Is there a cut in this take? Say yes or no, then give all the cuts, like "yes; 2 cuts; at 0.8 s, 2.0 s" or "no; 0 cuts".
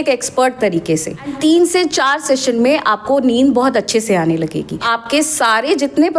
yes; 2 cuts; at 1.2 s, 4.8 s